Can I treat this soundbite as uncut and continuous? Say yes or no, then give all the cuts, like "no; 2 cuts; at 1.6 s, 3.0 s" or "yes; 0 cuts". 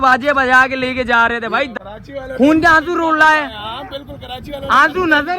no; 1 cut; at 1.7 s